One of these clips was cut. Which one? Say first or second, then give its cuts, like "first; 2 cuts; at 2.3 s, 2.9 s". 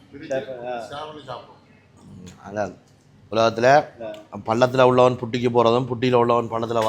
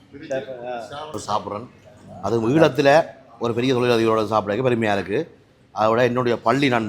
second; 1 cut; at 1.1 s